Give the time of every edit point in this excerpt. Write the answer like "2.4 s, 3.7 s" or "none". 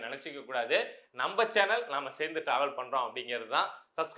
none